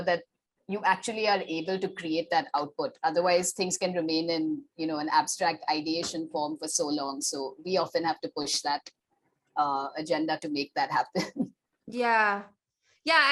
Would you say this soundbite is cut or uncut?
uncut